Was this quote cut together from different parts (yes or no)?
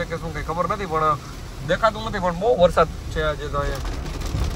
no